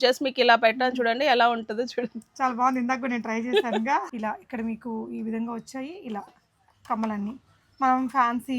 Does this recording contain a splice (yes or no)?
yes